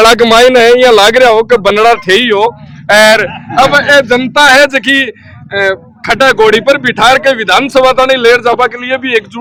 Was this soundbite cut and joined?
no; 0 cuts

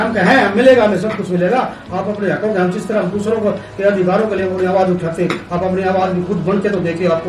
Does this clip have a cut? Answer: no; 0 cuts

